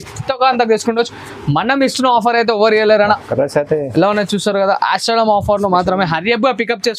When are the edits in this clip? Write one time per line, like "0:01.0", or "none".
0:03.2